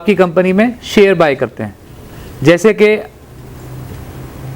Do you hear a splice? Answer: no; 0 cuts

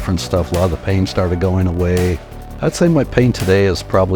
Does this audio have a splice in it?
yes; 1 cut; at 2.3 s

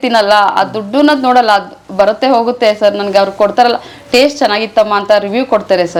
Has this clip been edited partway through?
no; 0 cuts

